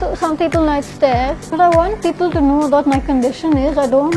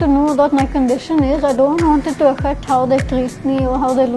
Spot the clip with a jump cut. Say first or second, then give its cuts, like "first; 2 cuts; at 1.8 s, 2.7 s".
first; 1 cut; at 1.4 s